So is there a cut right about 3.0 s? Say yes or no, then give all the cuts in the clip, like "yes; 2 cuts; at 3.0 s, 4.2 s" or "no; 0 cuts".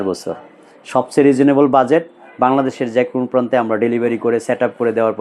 no; 0 cuts